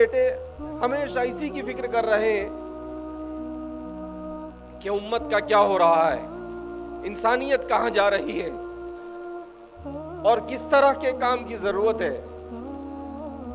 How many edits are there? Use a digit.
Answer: 0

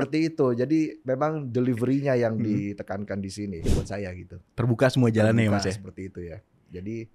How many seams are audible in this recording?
1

